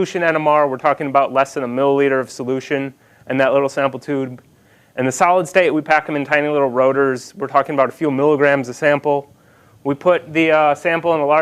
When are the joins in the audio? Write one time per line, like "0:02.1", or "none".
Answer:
0:04.1